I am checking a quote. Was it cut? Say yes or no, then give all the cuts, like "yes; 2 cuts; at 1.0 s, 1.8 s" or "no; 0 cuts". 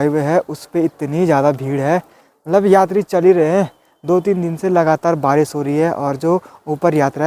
no; 0 cuts